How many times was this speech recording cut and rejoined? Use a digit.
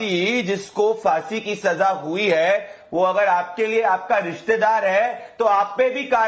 0